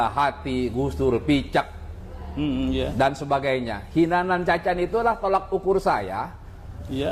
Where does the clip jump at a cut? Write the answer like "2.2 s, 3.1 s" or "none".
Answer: none